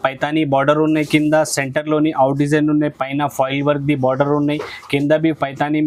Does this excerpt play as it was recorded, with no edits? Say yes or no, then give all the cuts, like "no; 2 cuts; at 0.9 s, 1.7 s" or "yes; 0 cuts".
yes; 0 cuts